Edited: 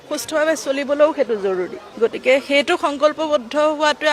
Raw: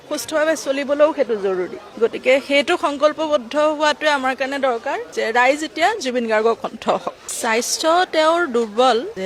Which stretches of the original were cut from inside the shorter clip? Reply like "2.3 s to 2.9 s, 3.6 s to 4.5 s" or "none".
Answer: none